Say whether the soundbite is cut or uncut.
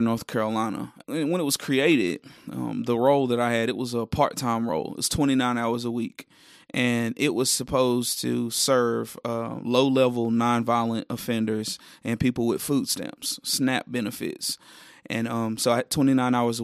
cut